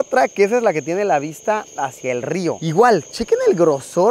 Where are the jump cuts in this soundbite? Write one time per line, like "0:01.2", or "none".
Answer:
none